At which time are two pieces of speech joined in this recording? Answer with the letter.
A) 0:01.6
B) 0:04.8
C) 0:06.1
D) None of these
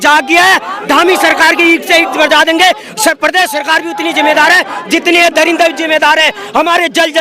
D